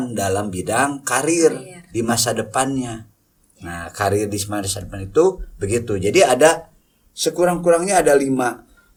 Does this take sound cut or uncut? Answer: uncut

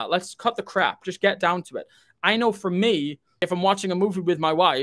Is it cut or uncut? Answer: cut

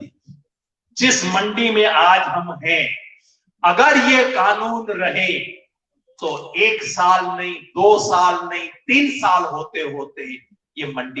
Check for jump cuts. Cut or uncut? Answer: uncut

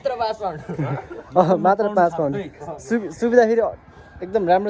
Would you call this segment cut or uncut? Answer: uncut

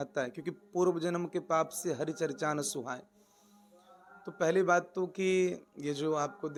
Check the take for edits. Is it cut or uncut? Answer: uncut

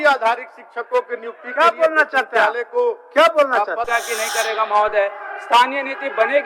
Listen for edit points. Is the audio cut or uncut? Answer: cut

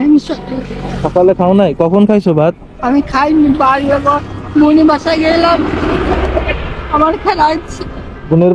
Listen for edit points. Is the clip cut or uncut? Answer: uncut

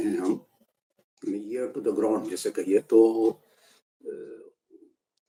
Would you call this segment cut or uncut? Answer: uncut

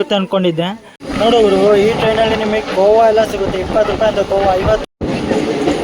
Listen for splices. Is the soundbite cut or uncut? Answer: cut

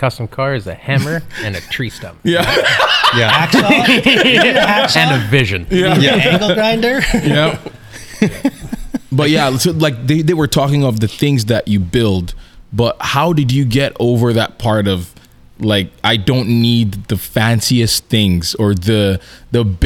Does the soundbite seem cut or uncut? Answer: uncut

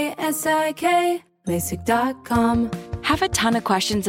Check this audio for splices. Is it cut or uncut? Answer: cut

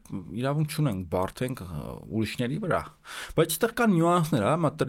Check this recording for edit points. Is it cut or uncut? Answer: uncut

